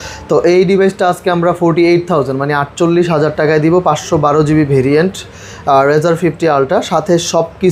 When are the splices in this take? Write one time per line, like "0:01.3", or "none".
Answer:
none